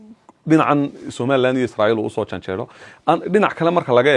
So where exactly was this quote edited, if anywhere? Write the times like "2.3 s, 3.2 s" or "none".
none